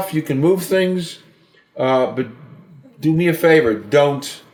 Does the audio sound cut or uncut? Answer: uncut